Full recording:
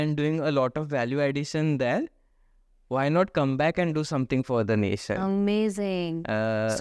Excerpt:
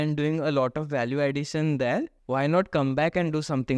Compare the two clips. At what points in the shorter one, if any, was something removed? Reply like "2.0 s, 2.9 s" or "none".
2.2 s